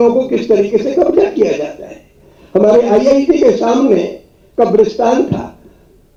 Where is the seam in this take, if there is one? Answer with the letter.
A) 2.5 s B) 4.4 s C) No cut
C